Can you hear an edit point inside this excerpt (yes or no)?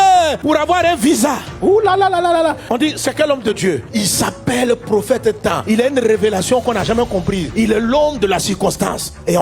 no